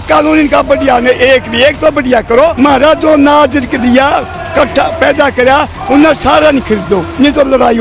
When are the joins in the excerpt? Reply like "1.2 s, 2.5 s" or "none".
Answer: 2.5 s